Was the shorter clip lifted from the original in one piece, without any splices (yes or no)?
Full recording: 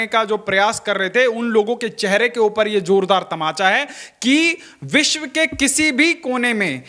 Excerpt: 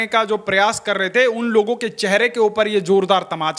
yes